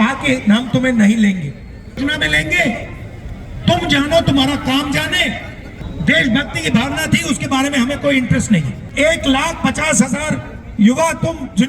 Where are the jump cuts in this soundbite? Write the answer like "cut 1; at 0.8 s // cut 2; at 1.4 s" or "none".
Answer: cut 1; at 8.8 s